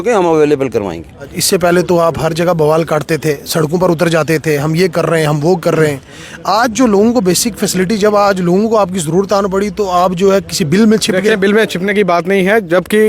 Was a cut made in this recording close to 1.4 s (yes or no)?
yes